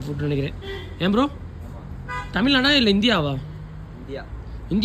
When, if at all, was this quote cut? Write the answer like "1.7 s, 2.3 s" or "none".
none